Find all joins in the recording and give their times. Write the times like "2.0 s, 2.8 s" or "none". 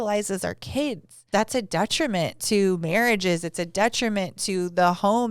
1.3 s

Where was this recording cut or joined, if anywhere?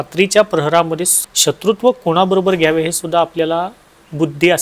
1.1 s

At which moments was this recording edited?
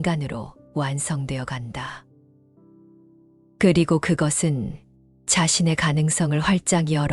2.0 s, 3.5 s

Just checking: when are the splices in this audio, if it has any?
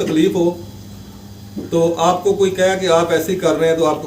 none

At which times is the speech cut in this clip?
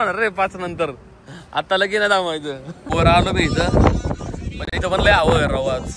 2.9 s

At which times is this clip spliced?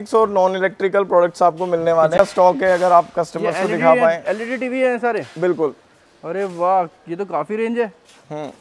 2.2 s

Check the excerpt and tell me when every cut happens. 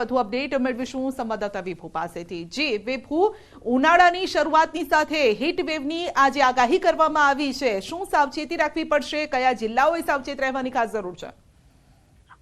2.8 s

